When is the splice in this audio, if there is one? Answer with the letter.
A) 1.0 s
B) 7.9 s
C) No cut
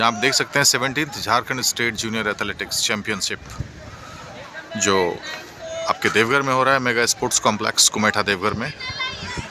C